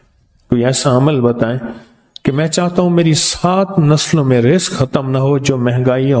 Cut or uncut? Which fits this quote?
uncut